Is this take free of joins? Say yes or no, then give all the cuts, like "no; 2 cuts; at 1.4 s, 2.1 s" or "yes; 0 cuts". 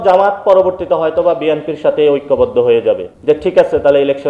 no; 1 cut; at 3.1 s